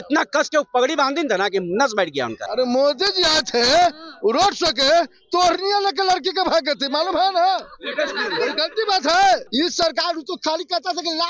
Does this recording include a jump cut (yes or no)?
yes